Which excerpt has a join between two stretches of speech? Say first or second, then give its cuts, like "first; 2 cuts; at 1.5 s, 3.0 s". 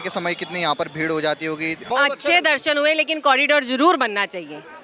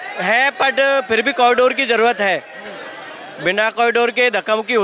first; 1 cut; at 1.8 s